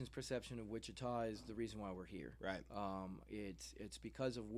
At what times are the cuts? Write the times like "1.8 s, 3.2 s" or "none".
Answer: none